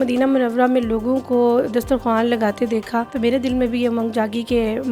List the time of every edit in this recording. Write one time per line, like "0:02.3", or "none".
0:03.1